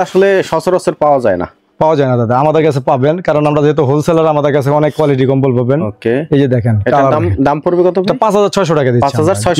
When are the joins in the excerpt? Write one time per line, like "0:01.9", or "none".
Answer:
none